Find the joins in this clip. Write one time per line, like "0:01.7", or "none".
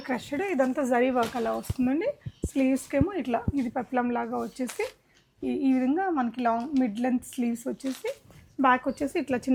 none